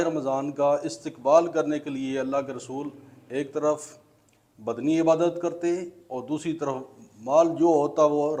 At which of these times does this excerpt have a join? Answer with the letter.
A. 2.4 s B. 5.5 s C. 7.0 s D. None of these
D